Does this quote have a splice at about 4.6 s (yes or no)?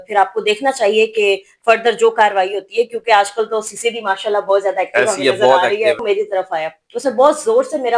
no